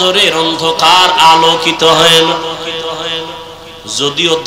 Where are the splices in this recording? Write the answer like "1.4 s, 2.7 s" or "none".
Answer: none